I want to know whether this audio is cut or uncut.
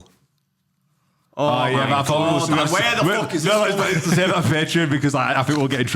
uncut